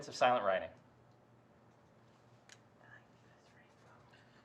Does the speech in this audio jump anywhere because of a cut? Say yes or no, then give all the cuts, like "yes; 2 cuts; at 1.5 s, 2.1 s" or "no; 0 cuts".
yes; 1 cut; at 2.5 s